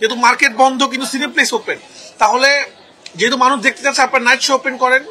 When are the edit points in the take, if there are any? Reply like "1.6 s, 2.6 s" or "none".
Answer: none